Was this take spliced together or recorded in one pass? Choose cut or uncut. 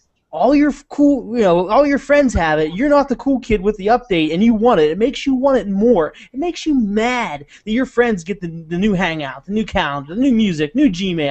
cut